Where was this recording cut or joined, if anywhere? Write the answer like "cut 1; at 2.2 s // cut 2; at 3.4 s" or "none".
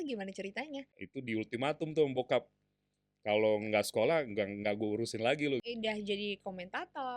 cut 1; at 1.0 s // cut 2; at 5.6 s